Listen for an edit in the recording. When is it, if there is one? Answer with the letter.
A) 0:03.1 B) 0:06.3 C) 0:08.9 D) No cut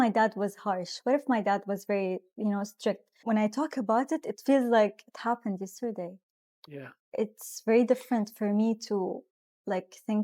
A